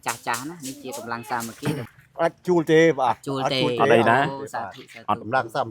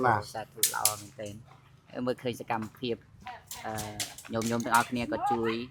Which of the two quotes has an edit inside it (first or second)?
first